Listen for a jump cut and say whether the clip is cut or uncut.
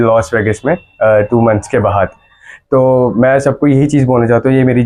uncut